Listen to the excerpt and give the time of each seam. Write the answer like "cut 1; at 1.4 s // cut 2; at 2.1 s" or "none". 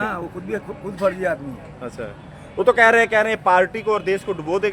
none